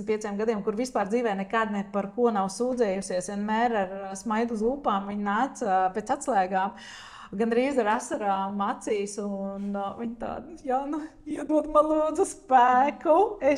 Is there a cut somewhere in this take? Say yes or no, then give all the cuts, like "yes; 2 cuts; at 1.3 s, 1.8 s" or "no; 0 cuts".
no; 0 cuts